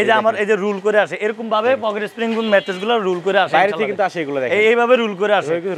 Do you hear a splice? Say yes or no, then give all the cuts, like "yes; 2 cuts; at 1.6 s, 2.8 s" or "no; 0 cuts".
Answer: no; 0 cuts